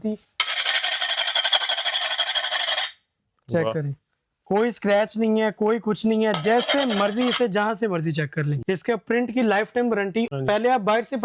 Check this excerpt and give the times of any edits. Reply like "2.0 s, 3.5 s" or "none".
8.6 s, 10.3 s

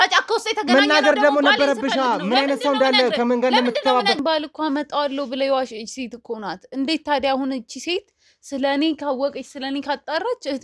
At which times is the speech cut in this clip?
4.2 s

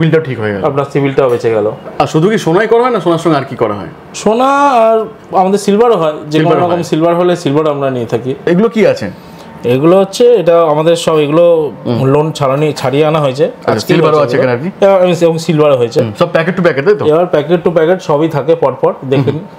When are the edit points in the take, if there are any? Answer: none

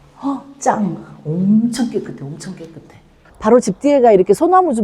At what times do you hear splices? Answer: 3.2 s

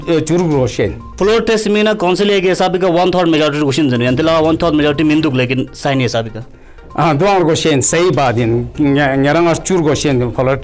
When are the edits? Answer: 1.1 s

